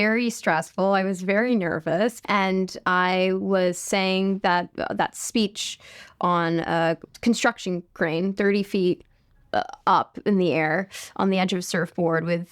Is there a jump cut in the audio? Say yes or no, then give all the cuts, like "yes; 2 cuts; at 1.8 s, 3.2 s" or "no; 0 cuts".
yes; 1 cut; at 2.2 s